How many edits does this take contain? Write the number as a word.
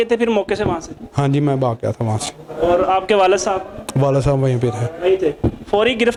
zero